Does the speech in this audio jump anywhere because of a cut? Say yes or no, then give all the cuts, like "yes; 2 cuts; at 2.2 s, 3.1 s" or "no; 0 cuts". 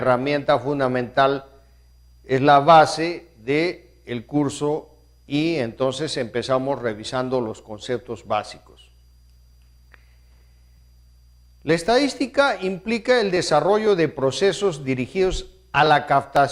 yes; 1 cut; at 2.8 s